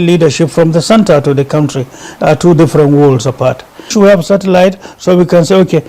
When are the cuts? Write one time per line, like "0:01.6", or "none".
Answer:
0:03.9